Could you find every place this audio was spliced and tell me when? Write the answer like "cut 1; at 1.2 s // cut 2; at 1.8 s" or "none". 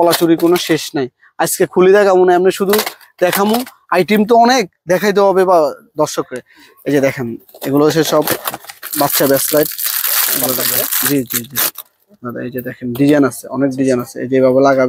none

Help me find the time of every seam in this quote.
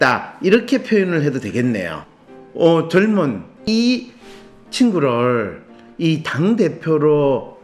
cut 1; at 1.9 s // cut 2; at 3.6 s

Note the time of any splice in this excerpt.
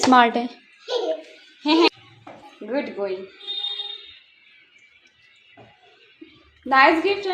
cut 1; at 1.9 s

